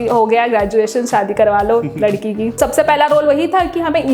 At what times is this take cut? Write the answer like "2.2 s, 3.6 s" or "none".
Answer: 2.6 s